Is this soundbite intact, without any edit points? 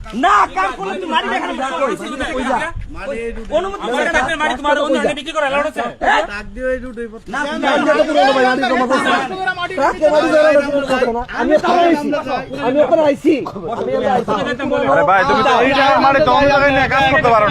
yes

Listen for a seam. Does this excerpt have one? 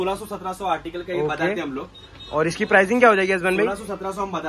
no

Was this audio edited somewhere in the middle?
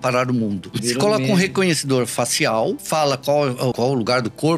yes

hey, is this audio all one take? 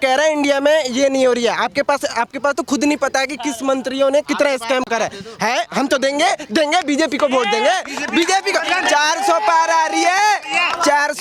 yes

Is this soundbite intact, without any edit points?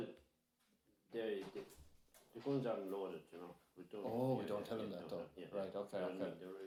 yes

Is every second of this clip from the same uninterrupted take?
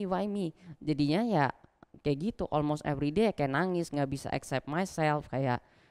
yes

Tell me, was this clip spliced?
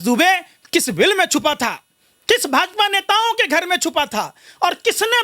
no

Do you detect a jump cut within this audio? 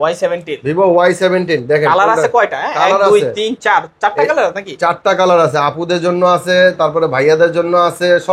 no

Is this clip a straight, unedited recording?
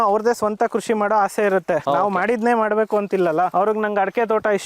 no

